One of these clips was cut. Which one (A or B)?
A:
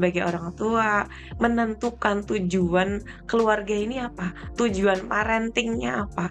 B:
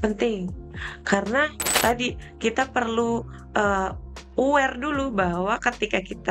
B